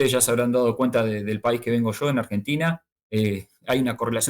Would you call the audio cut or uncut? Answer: cut